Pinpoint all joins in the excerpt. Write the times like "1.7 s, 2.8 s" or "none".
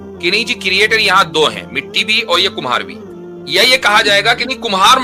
none